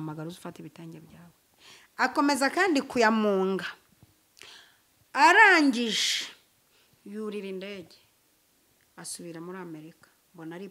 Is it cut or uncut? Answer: uncut